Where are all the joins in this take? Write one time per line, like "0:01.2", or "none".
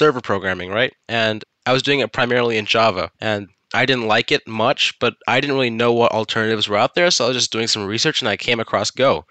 0:01.3
0:03.1